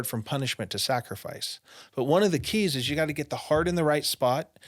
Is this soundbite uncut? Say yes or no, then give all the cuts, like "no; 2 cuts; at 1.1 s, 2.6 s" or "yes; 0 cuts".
yes; 0 cuts